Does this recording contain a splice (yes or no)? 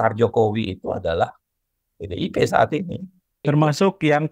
yes